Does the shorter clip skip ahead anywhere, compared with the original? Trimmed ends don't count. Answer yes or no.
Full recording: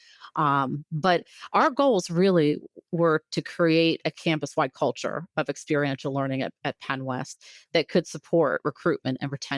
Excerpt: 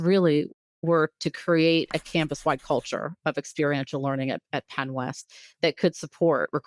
no